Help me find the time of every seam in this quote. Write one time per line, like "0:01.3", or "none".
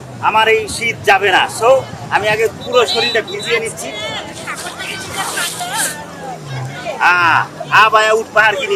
none